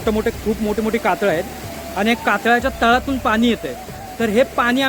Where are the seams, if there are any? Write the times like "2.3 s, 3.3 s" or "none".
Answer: none